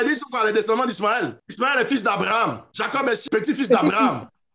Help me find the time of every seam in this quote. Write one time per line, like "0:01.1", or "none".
0:01.4
0:02.9